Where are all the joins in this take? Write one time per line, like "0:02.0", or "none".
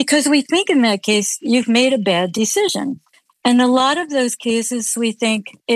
0:03.2